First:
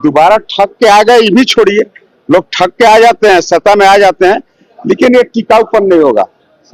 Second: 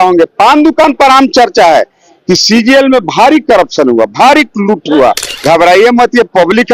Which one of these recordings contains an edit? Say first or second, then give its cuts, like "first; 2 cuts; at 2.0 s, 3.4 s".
second; 1 cut; at 5.3 s